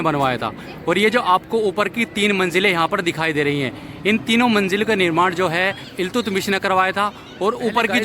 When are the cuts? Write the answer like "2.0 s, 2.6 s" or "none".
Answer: 5.9 s